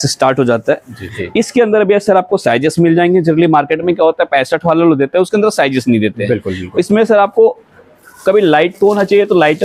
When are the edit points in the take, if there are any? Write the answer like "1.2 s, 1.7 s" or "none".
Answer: 1.1 s